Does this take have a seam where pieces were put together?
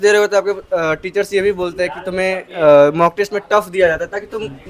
no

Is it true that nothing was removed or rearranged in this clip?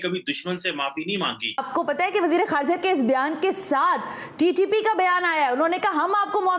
no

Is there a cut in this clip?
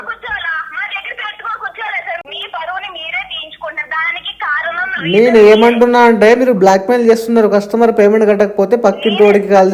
yes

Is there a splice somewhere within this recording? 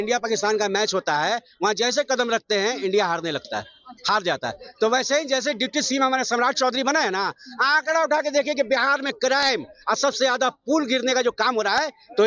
no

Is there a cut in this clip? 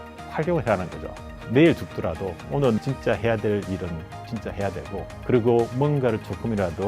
yes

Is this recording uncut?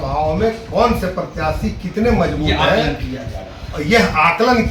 yes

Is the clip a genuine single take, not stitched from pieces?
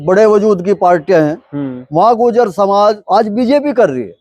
no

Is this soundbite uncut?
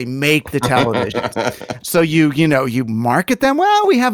no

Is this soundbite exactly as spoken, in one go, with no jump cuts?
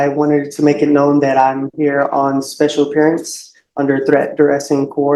yes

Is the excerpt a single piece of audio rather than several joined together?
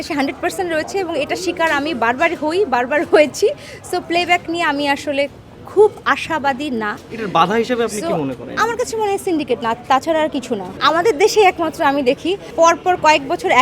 no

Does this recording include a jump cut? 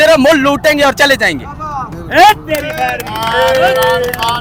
no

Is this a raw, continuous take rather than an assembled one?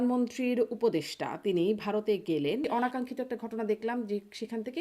no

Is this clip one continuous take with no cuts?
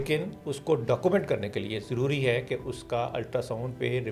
yes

